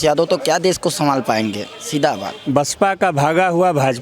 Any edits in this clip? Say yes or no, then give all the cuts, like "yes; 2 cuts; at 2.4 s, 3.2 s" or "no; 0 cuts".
yes; 1 cut; at 2.4 s